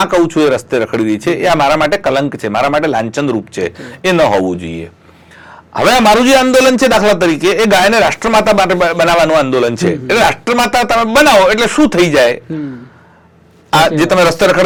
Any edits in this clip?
no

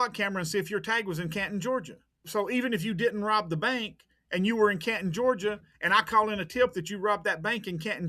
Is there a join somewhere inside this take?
yes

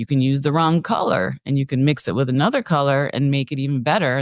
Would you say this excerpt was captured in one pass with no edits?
yes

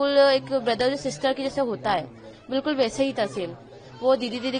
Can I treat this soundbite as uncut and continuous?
yes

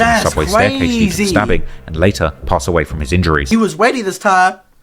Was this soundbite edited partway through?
yes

